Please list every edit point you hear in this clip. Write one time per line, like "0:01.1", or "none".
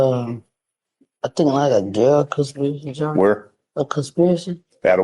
none